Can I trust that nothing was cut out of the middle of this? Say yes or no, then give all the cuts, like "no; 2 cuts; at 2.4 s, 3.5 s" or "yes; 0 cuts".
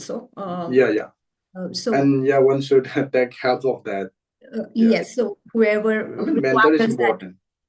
yes; 0 cuts